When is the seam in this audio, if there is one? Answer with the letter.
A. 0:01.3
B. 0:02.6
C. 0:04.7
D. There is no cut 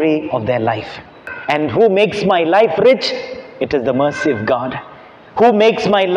A